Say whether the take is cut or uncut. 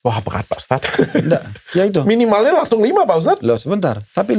uncut